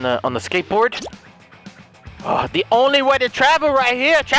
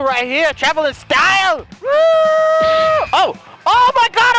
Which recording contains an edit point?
second; 2 cuts; at 1.7 s, 3.1 s

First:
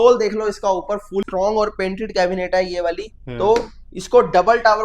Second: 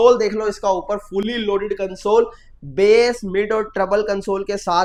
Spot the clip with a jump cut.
first; 1 cut; at 1.3 s

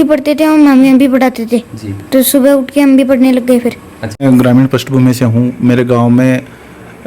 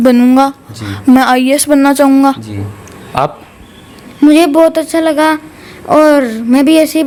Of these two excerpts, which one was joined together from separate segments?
first; 1 cut; at 4.2 s

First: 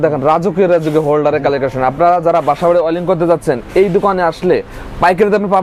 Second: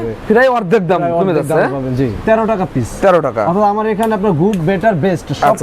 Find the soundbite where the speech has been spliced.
second; 1 cut; at 2.2 s

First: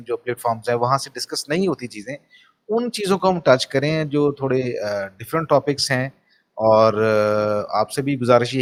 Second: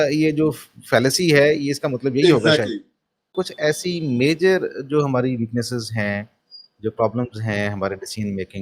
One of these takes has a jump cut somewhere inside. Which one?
second; 1 cut; at 3.3 s

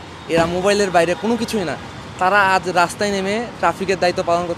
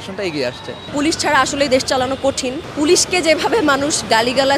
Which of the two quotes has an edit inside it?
second; 2 cuts; at 0.9 s, 2.7 s

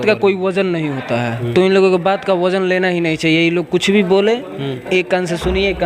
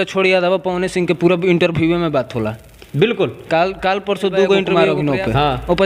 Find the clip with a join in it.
second; 1 cut; at 4.7 s

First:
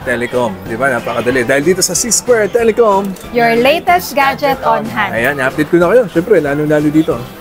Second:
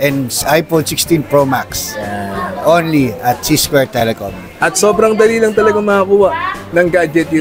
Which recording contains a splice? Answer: second; 1 cut; at 4.4 s

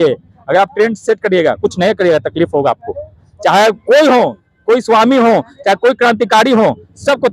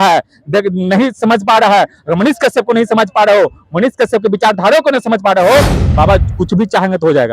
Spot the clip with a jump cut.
second; 1 cut; at 5.8 s

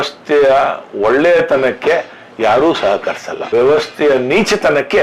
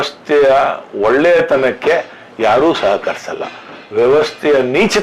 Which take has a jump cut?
first; 1 cut; at 3.3 s

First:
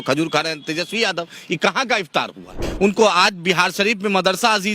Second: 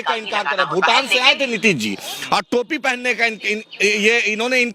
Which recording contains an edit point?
first; 1 cut; at 2.6 s

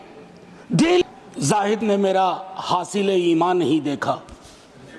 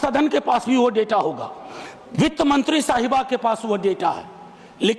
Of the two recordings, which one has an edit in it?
first; 1 cut; at 1.0 s

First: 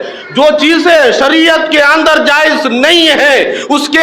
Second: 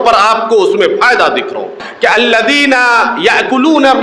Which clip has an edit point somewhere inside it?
second; 1 cut; at 1.9 s

